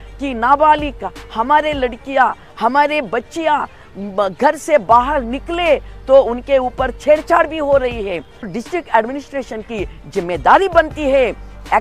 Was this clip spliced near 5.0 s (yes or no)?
no